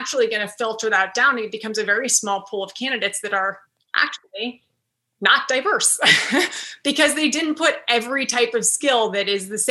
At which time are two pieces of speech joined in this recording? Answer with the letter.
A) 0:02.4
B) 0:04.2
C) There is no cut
B